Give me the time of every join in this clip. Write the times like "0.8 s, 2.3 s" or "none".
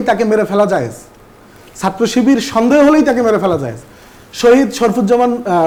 none